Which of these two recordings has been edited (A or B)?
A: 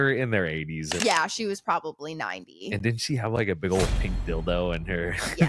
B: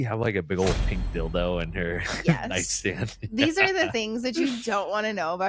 A